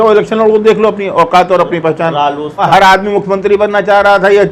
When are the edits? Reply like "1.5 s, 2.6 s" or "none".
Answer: 2.7 s